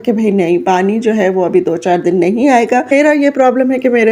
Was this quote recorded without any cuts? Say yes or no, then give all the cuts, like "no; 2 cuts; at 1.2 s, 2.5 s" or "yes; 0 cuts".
no; 1 cut; at 2.9 s